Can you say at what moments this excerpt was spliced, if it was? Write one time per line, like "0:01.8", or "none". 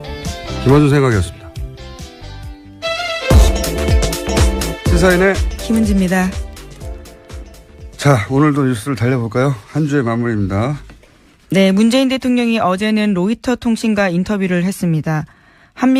none

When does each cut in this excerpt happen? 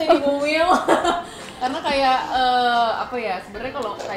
0:01.6

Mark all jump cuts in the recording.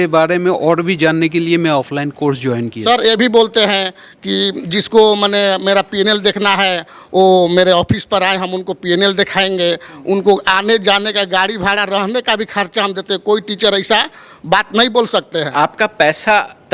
0:02.7
0:15.5

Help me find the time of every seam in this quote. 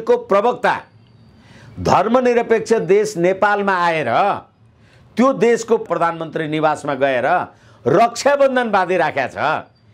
0:05.8

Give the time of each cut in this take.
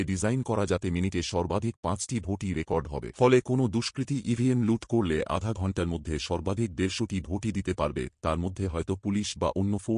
none

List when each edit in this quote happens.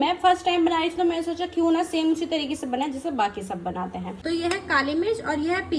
0:04.1

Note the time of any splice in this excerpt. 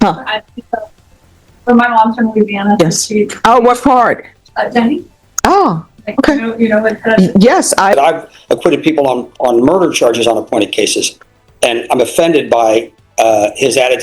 0:07.9

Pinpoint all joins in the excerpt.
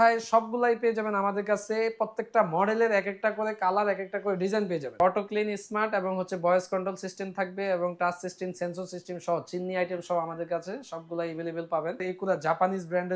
0:05.0
0:12.0

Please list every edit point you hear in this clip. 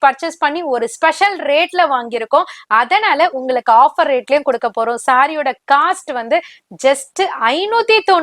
none

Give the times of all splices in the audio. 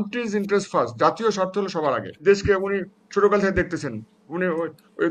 0:02.2

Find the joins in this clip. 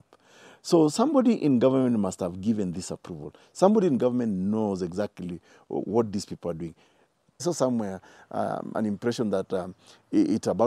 0:07.4

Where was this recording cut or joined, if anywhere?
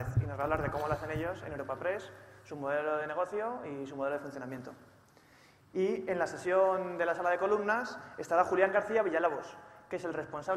0:06.9

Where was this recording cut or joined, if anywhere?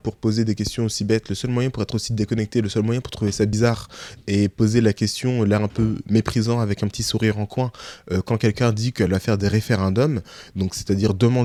none

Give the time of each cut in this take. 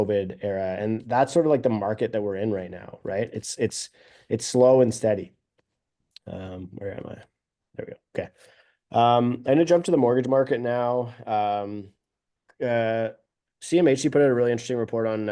none

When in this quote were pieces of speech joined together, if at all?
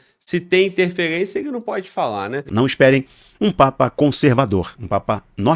0:02.4

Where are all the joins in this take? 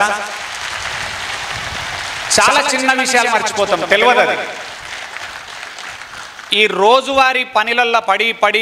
none

